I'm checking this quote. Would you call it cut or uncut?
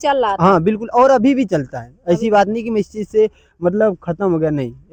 uncut